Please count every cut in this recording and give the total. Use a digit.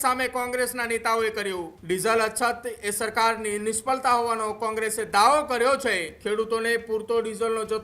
2